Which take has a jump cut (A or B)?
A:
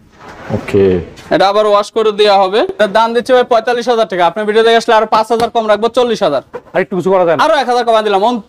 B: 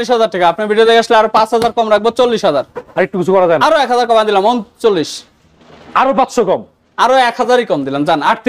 A